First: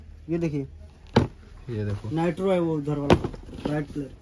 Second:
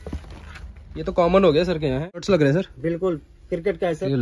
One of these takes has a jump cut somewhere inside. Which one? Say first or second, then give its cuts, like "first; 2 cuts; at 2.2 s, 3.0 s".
second; 1 cut; at 2.2 s